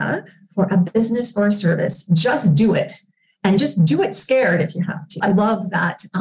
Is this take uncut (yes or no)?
no